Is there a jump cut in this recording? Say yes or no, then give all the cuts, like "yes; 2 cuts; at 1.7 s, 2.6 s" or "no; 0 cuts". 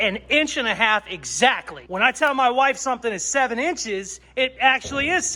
yes; 1 cut; at 1.8 s